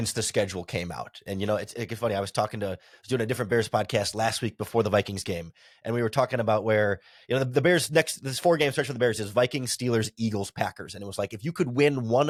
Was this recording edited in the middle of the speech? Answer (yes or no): no